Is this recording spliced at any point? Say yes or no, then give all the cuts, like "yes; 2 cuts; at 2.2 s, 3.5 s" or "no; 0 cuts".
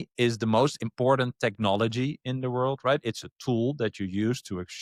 no; 0 cuts